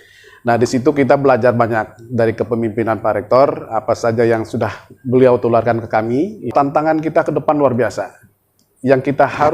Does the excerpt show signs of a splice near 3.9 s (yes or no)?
no